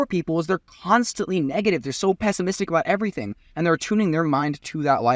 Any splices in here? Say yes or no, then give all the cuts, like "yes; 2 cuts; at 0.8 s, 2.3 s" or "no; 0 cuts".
no; 0 cuts